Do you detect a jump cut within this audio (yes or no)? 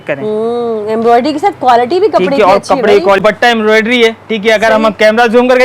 yes